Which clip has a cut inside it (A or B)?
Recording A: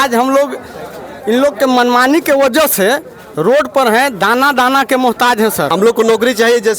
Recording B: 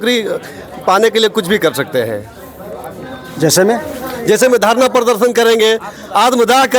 A